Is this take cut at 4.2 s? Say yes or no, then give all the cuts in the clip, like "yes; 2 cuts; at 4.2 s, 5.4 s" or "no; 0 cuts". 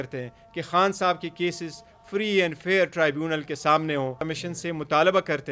yes; 1 cut; at 4.2 s